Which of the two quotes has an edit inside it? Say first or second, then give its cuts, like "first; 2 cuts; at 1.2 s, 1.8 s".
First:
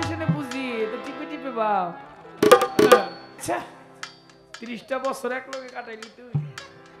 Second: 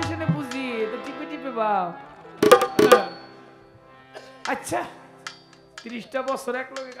first; 1 cut; at 3.4 s